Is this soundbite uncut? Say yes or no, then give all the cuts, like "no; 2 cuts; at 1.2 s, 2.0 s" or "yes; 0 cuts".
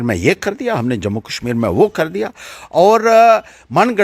yes; 0 cuts